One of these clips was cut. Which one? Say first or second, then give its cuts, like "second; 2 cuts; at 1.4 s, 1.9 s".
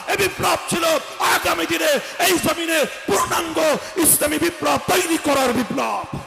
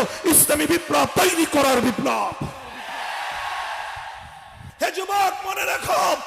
second; 1 cut; at 4.6 s